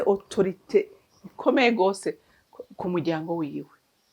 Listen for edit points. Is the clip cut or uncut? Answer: uncut